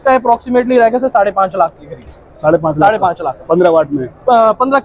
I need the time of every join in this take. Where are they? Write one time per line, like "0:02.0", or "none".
none